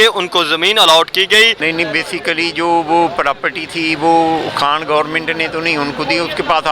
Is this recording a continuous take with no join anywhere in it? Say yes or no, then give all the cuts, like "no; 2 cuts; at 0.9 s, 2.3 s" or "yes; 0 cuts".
no; 1 cut; at 1.6 s